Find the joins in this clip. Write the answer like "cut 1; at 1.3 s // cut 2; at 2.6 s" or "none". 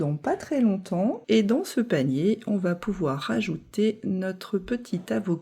cut 1; at 1.2 s